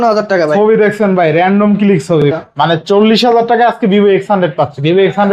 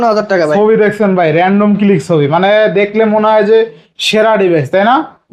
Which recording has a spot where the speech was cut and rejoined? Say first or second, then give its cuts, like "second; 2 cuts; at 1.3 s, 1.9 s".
first; 1 cut; at 2.3 s